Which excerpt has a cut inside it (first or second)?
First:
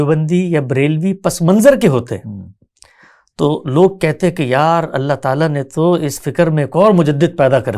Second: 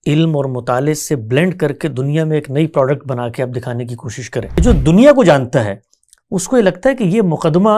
second